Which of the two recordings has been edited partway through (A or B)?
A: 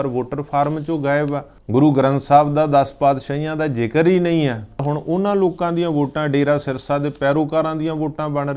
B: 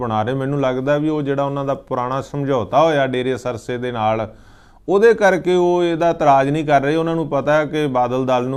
A